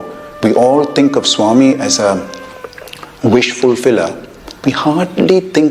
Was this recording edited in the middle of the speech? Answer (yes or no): yes